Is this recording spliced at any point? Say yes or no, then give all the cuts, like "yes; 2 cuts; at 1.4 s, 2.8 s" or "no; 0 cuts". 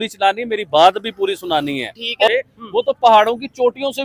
yes; 1 cut; at 2.3 s